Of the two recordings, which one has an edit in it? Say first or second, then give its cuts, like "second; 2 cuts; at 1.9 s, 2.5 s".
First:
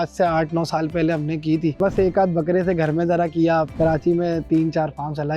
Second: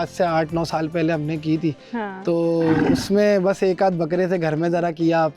first; 2 cuts; at 1.8 s, 3.7 s